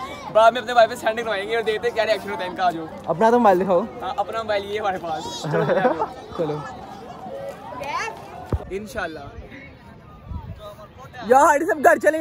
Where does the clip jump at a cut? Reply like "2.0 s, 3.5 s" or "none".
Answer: 8.7 s